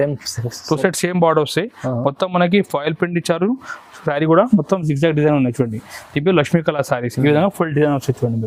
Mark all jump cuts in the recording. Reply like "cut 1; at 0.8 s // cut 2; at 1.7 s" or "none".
none